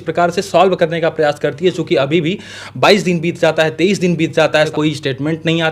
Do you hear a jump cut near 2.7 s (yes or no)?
no